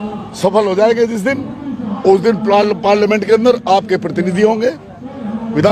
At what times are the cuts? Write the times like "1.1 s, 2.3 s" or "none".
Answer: none